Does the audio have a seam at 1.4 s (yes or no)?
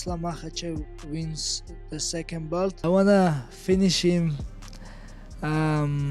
no